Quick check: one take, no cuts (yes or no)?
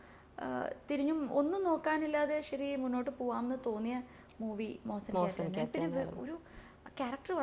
yes